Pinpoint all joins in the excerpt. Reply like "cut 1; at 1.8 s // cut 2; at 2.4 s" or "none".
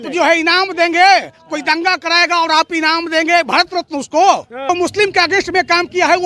cut 1; at 4.7 s